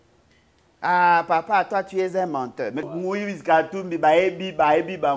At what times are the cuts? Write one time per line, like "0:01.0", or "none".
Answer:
0:02.8